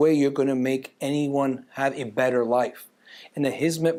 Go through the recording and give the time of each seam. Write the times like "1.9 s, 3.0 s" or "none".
none